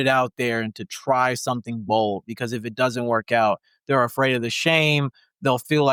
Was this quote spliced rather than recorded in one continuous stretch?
no; 0 cuts

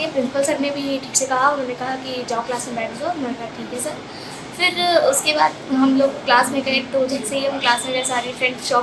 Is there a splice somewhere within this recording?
no; 0 cuts

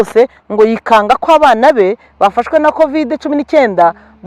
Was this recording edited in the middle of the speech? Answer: no; 0 cuts

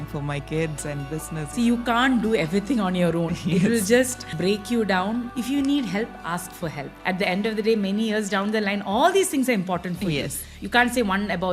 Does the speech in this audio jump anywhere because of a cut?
yes; 5 cuts; at 1.5 s, 4.2 s, 5.3 s, 6.9 s, 10.4 s

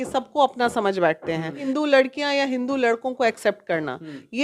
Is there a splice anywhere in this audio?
yes; 1 cut; at 1.6 s

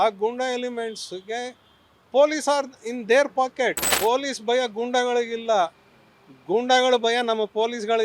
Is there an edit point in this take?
yes; 1 cut; at 3.9 s

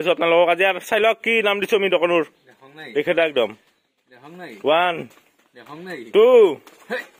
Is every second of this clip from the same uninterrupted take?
yes; 0 cuts

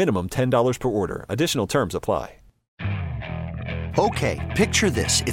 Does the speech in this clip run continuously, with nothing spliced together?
no; 1 cut; at 2.8 s

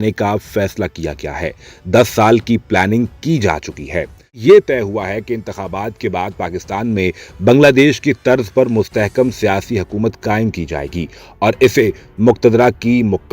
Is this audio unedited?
no; 1 cut; at 4.4 s

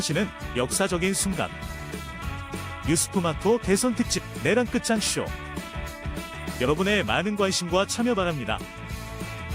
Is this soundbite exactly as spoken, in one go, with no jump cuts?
yes; 0 cuts

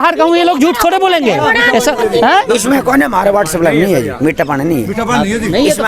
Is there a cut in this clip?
no; 0 cuts

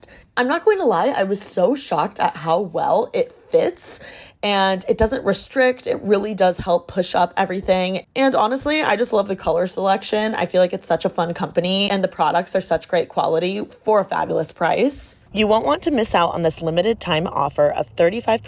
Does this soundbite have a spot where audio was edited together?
yes; 1 cut; at 15.2 s

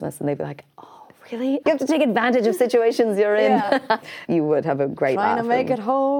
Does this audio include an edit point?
yes; 2 cuts; at 1.6 s, 4.2 s

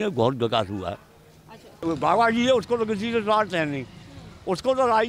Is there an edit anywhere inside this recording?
yes; 1 cut; at 1.8 s

